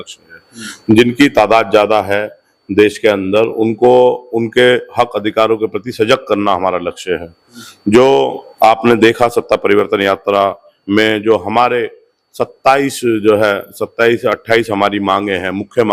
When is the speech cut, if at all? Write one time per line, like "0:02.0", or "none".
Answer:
none

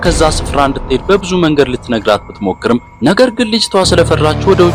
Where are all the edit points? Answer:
none

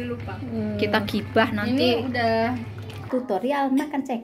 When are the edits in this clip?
0:03.0

